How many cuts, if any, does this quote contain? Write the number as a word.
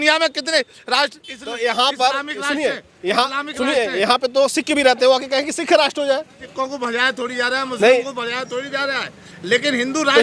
one